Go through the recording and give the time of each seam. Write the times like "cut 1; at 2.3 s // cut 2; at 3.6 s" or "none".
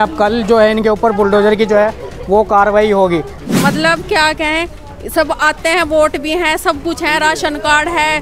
cut 1; at 3.3 s